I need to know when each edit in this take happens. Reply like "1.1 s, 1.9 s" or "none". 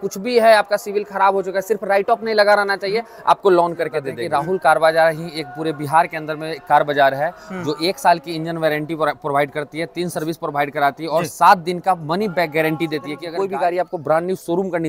4.1 s, 13.2 s